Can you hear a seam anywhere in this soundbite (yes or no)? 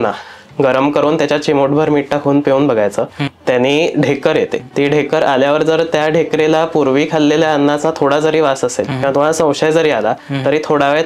yes